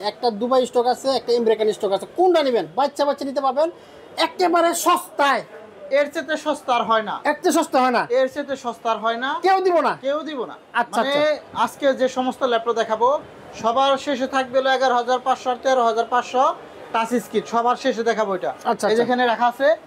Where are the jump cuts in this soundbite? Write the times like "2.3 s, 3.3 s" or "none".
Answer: none

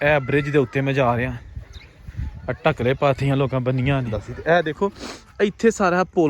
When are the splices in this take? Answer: 4.1 s

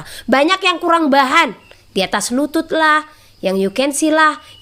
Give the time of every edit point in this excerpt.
none

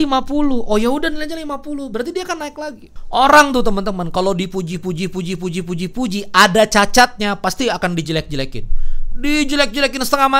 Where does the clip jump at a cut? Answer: 2.9 s

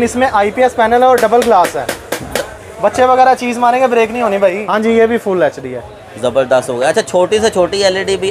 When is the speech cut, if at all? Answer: 4.6 s

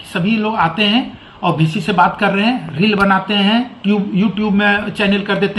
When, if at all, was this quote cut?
none

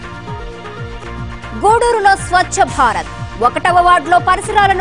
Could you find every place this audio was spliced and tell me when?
1.0 s

